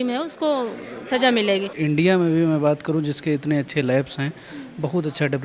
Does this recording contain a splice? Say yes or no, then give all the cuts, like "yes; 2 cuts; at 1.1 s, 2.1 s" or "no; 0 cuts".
yes; 1 cut; at 1.7 s